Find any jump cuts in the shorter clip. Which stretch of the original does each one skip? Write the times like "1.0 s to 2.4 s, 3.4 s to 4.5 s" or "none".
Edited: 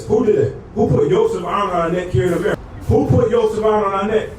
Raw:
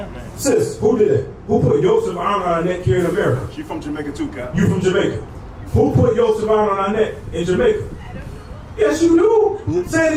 3.3 s to 5.4 s

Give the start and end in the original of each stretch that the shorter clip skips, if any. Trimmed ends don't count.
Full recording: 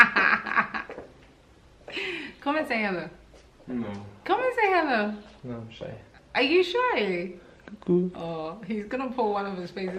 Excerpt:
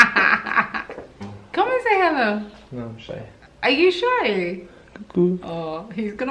1.3 s to 4.1 s

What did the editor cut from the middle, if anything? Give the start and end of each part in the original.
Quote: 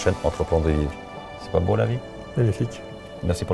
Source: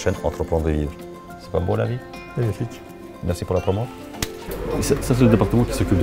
none

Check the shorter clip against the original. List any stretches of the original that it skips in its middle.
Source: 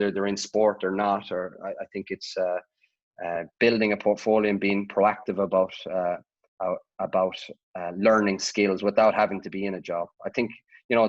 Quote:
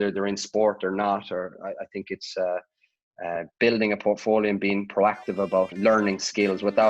5.7 s to 7.9 s

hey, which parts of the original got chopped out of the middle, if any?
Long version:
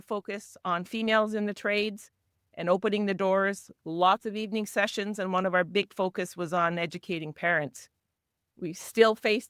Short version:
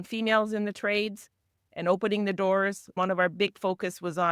3.7 s to 5.3 s

